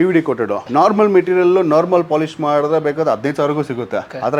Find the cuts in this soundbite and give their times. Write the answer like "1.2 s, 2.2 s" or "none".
none